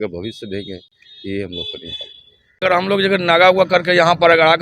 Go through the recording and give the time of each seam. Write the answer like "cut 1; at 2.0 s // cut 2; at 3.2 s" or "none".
cut 1; at 2.6 s

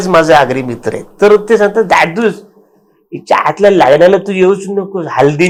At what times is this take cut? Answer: none

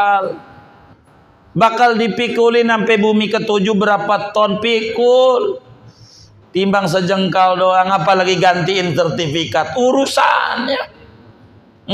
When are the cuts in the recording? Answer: none

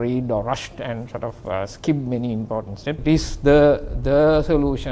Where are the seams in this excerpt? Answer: cut 1; at 3.0 s

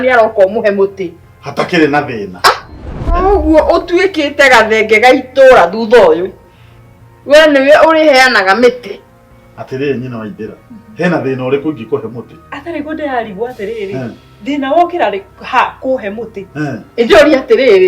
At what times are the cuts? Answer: cut 1; at 3.1 s

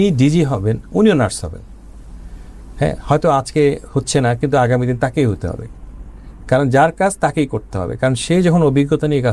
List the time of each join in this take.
none

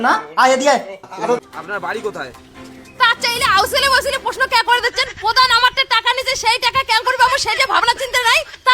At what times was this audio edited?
cut 1; at 1.4 s

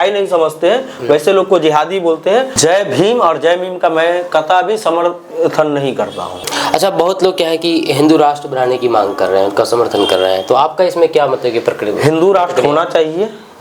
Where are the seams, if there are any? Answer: cut 1; at 2.5 s // cut 2; at 6.5 s

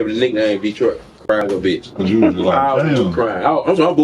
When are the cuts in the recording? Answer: cut 1; at 1.2 s

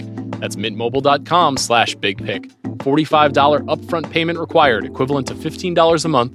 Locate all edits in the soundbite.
none

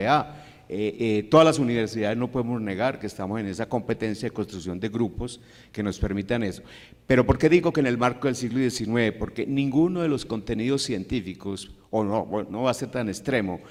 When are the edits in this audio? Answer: none

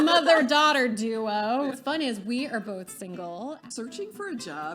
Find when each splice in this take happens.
cut 1; at 1.7 s // cut 2; at 3.6 s

